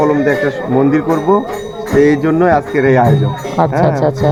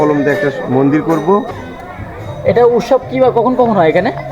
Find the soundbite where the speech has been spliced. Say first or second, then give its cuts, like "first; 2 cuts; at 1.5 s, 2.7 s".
second; 1 cut; at 1.6 s